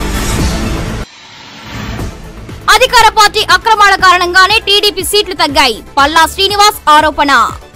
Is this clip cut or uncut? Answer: cut